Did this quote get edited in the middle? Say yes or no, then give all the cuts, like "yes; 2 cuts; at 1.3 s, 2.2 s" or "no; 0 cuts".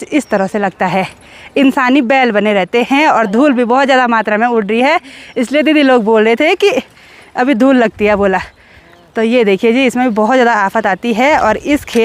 no; 0 cuts